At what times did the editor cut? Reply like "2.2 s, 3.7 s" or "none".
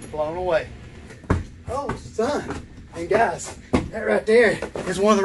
1.1 s

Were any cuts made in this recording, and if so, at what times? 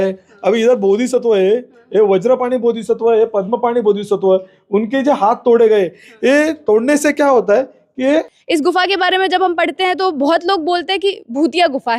8.4 s

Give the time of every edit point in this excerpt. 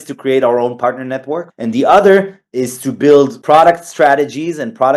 1.5 s, 3.4 s

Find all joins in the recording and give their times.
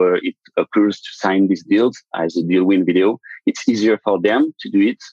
none

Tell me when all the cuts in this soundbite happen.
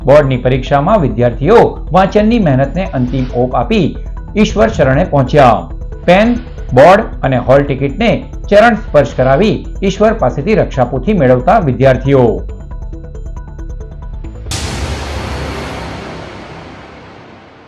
14.5 s

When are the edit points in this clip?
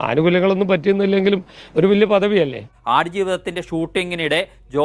2.7 s

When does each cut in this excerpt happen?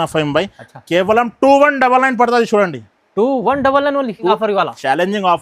4.3 s

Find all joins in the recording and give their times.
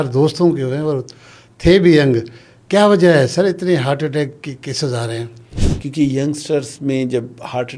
5.5 s

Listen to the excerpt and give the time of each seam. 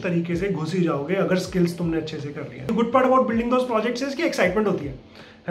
2.7 s

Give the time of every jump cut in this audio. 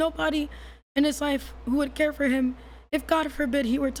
none

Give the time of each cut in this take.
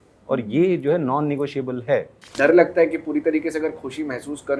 2.3 s

